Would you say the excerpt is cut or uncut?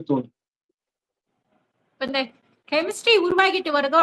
uncut